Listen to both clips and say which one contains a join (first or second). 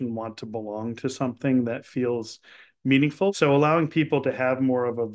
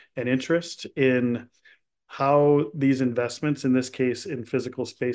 first